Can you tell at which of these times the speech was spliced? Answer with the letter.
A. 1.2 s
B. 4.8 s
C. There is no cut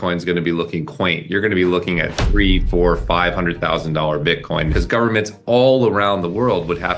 B